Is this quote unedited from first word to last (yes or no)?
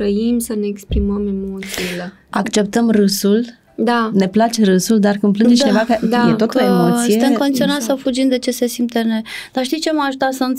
yes